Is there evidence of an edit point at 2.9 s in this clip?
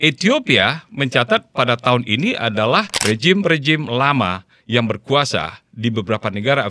yes; 1 cut; at 2.9 s

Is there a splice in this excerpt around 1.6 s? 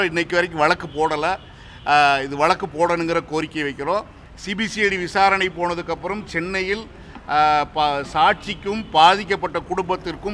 no; 1 cut; at 4.2 s

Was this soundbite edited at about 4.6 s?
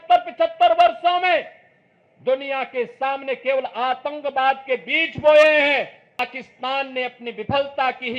no; 1 cut; at 6.2 s

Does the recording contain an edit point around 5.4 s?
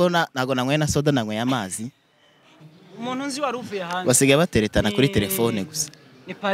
no; 1 cut; at 2.6 s

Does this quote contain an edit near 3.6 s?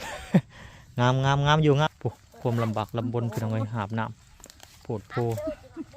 no; 1 cut; at 1.9 s

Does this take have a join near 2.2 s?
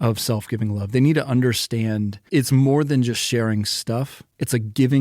yes; 1 cut; at 2.2 s

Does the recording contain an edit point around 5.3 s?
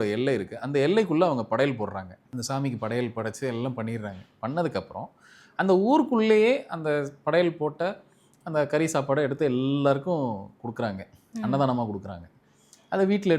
no; 1 cut; at 2.2 s

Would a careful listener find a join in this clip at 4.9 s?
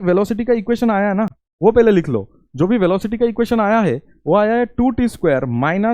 no; 1 cut; at 1.4 s

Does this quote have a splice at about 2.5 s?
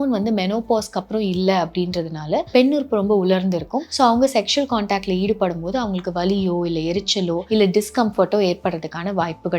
yes; 3 cuts; at 2.5 s, 3.8 s, 7.4 s

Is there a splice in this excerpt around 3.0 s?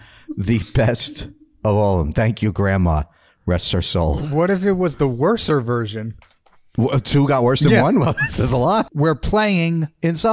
no; 1 cut; at 8.9 s

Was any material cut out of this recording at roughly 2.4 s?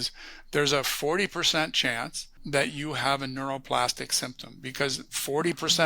yes; 1 cut; at 2.4 s

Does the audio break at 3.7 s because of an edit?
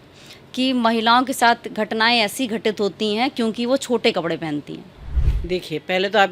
no; 1 cut; at 5.2 s

